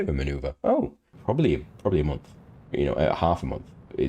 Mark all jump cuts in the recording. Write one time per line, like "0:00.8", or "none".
0:01.1